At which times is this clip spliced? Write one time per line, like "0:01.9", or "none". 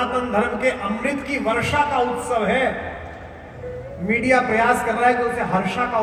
none